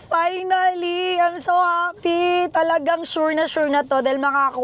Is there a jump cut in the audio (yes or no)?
no